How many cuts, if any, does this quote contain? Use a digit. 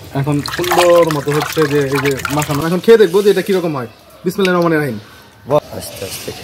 2